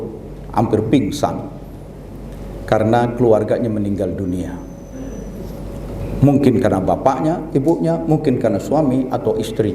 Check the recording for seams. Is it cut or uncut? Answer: uncut